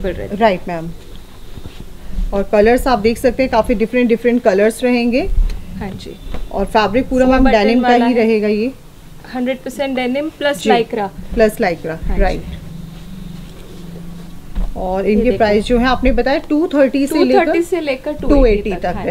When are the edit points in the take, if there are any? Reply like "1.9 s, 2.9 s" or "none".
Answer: none